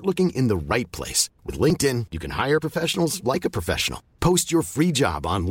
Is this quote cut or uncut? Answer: uncut